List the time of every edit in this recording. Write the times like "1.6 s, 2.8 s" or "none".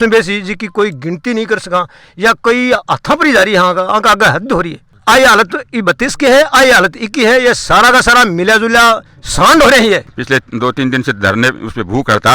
4.8 s, 10.1 s